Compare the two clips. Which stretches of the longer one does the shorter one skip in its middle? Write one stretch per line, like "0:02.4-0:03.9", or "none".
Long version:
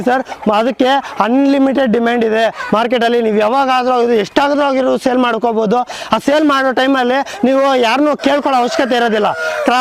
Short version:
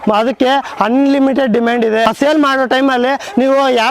0:02.4-0:06.1